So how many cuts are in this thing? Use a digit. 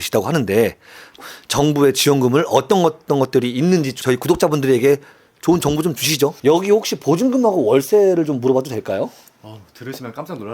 1